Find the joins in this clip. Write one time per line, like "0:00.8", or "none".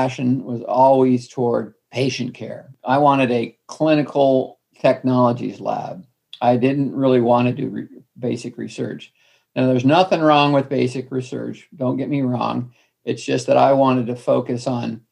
0:01.8
0:04.6